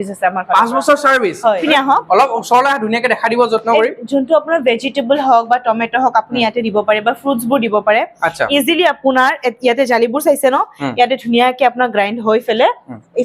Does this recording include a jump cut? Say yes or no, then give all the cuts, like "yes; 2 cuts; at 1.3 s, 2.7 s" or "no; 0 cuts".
yes; 1 cut; at 1.6 s